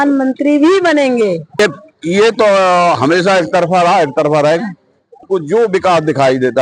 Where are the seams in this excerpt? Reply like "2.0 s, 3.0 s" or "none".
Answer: 1.6 s, 5.2 s